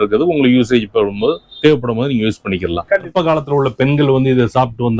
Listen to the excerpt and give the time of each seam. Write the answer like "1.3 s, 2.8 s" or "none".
3.1 s